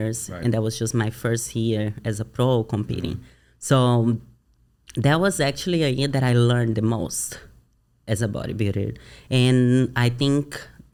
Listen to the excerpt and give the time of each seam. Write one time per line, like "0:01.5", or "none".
none

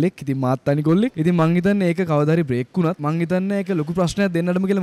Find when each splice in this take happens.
0:01.2
0:03.0

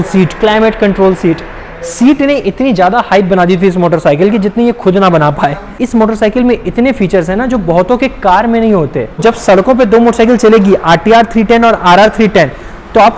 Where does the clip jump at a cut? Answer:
0:05.8
0:09.2

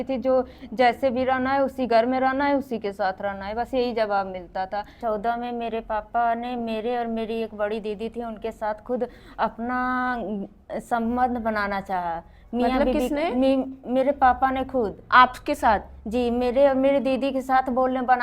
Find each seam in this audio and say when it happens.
0:05.0

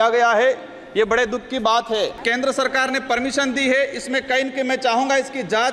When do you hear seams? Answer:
0:02.2

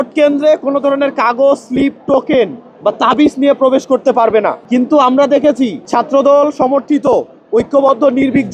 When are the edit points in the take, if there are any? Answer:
0:04.6
0:05.8

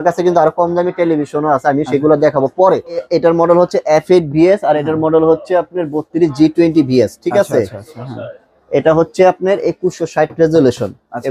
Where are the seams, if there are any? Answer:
0:03.1

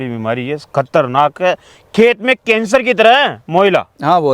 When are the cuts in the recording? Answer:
none

